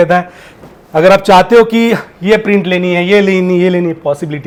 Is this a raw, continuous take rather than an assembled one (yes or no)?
yes